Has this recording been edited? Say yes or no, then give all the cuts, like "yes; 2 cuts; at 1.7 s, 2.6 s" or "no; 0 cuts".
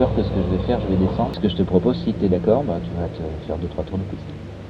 yes; 1 cut; at 1.3 s